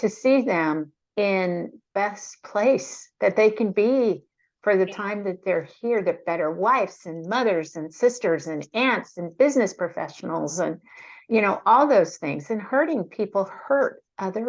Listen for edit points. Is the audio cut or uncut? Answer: cut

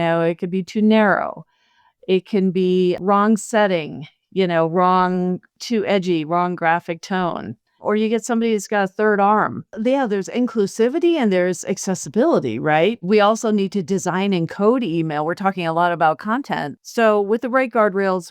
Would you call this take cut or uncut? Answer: cut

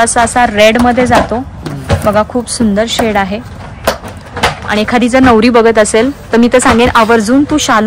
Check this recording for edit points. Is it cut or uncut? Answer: uncut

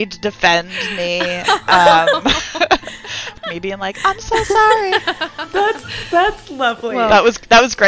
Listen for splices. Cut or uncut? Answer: cut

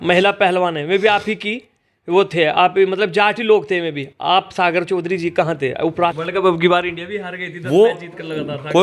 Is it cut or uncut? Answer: cut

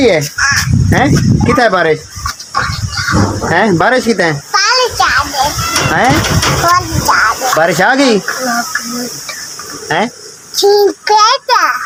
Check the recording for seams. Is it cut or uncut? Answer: uncut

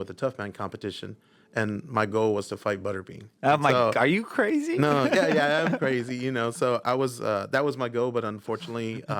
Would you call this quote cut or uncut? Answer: uncut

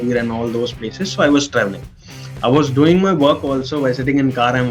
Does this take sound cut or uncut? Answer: uncut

